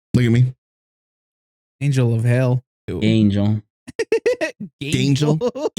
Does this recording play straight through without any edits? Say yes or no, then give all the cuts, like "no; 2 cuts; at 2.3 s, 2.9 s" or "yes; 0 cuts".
no; 1 cut; at 2.9 s